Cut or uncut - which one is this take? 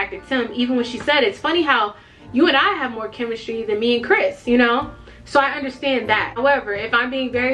uncut